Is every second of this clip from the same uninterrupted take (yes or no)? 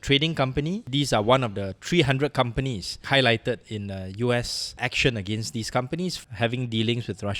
no